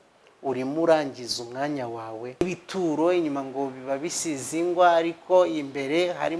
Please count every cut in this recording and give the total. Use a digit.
1